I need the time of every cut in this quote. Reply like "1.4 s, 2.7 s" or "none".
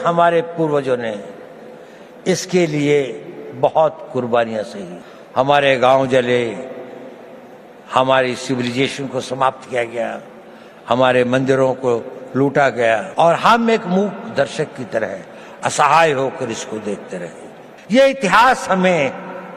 none